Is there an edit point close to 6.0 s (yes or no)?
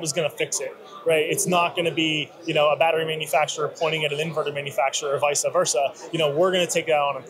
no